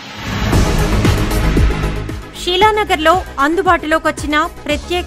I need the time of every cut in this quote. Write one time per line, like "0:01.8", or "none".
0:01.9